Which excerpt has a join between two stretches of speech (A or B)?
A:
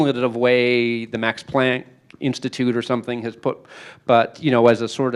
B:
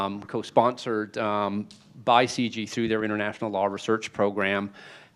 A